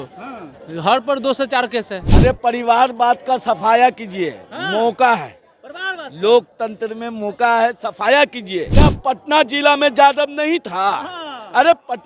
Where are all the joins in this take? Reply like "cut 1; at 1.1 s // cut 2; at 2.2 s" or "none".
cut 1; at 2.0 s // cut 2; at 8.7 s